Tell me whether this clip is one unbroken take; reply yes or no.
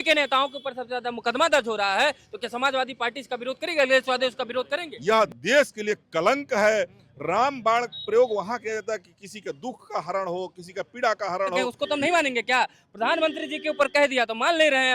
no